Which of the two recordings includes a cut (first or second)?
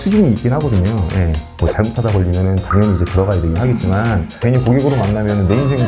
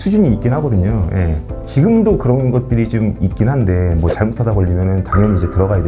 first